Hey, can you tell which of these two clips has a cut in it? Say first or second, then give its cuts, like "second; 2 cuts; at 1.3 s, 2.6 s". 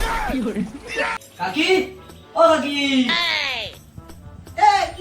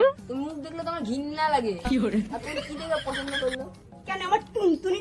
first; 1 cut; at 1.2 s